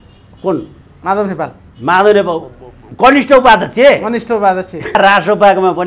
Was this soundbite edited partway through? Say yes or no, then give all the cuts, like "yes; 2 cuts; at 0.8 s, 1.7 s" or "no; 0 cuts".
yes; 1 cut; at 5.0 s